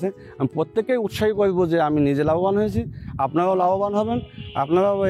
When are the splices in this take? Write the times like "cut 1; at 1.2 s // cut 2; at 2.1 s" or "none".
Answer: none

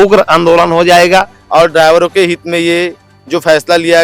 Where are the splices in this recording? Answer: cut 1; at 1.4 s

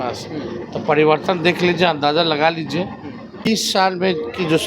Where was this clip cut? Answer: cut 1; at 3.5 s

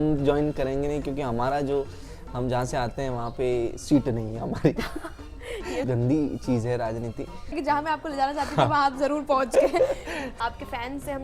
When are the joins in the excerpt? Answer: cut 1; at 5.8 s // cut 2; at 7.6 s // cut 3; at 10.2 s

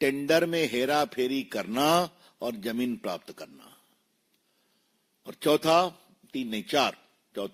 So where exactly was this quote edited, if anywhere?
none

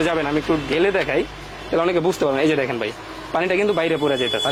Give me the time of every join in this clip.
none

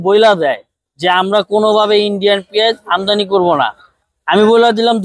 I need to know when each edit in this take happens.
none

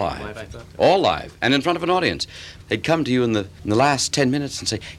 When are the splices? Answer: cut 1; at 2.5 s // cut 2; at 3.5 s

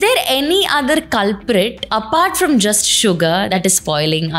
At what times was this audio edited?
cut 1; at 1.8 s // cut 2; at 3.5 s

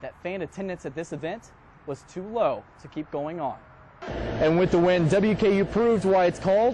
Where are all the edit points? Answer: cut 1; at 4.0 s

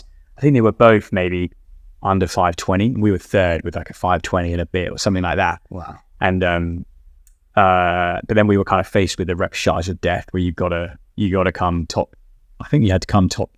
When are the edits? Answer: none

